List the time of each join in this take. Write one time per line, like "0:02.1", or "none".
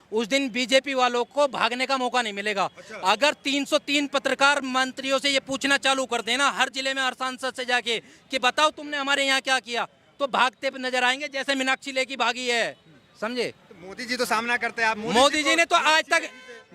none

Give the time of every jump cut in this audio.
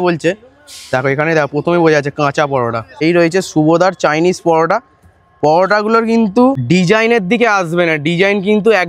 0:03.0
0:06.6

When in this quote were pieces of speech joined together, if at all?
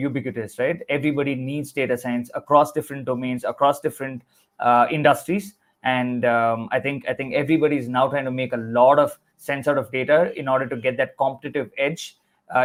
none

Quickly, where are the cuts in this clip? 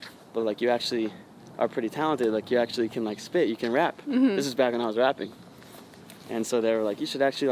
none

